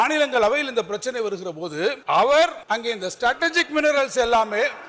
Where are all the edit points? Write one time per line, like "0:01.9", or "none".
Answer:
0:02.0
0:02.6